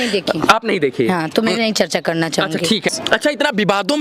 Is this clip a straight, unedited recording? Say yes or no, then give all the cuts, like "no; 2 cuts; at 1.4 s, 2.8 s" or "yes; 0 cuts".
no; 1 cut; at 2.9 s